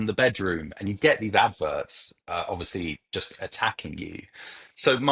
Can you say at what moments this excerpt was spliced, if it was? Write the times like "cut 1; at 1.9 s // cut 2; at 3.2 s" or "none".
none